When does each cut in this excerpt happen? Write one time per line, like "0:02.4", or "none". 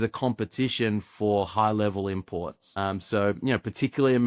0:02.6